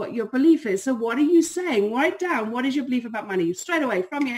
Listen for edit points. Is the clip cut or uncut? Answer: uncut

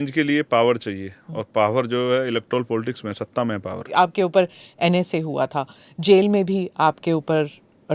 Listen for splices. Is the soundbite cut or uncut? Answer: cut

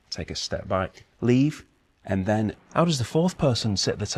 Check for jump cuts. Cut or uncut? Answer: cut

